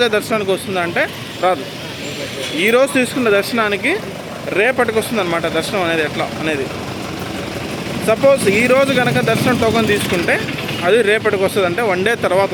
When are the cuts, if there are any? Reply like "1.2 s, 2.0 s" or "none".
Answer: none